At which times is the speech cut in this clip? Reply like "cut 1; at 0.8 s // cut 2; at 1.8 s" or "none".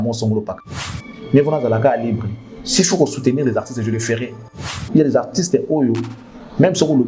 cut 1; at 0.9 s // cut 2; at 4.7 s